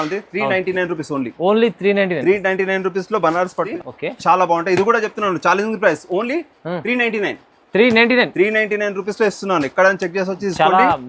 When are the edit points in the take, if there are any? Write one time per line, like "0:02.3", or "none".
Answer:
0:03.7

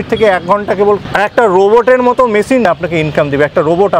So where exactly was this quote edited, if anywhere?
0:01.0
0:02.7

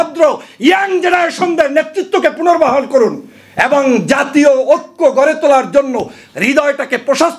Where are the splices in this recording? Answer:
none

